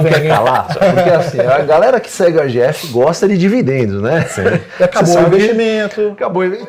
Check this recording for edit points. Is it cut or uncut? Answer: uncut